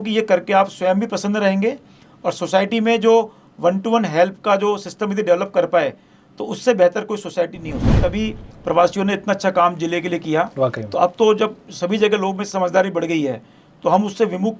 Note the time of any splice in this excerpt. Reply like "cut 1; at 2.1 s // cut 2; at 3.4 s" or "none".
cut 1; at 8.0 s